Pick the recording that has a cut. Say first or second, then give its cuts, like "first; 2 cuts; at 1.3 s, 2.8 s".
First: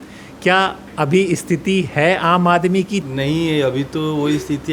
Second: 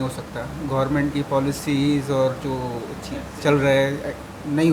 first; 1 cut; at 3.0 s